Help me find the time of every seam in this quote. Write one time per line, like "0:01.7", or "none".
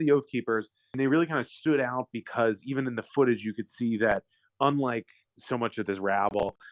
0:01.0